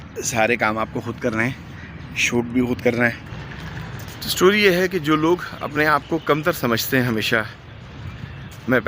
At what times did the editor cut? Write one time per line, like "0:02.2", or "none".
0:03.2